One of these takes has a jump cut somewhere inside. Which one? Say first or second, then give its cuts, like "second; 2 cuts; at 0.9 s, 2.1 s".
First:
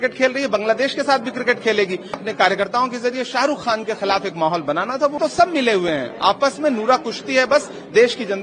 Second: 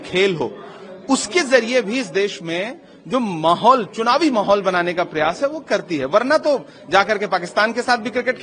first; 2 cuts; at 2.2 s, 5.2 s